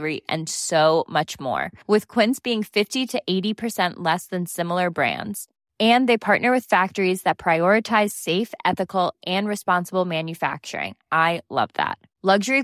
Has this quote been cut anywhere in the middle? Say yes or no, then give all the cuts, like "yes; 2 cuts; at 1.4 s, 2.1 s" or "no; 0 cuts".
no; 0 cuts